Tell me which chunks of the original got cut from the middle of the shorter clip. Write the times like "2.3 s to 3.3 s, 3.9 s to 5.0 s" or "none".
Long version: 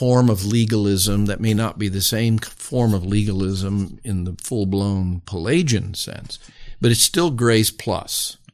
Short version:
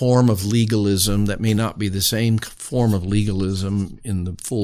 none